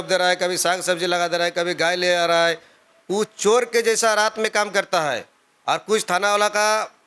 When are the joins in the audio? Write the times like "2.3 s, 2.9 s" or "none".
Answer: none